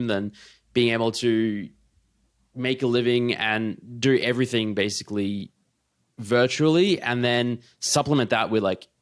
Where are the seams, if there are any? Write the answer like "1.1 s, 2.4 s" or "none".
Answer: 7.9 s